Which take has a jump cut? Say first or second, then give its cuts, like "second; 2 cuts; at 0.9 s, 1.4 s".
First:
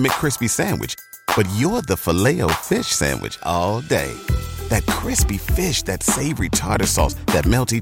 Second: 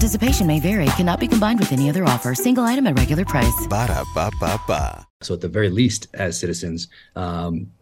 second; 1 cut; at 5.2 s